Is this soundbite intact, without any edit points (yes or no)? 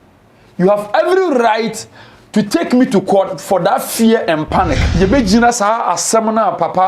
no